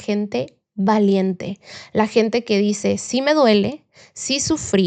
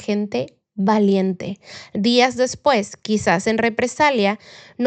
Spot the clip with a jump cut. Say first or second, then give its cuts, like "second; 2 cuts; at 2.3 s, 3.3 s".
second; 1 cut; at 1.9 s